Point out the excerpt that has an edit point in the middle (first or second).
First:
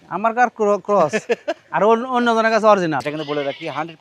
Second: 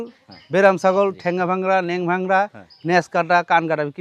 first